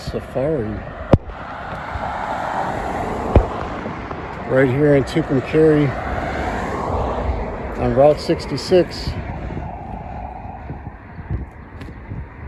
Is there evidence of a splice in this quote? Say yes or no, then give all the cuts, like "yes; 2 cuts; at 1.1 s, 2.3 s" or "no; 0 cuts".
no; 0 cuts